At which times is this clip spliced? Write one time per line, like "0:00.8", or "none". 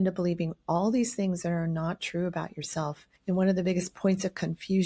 0:03.1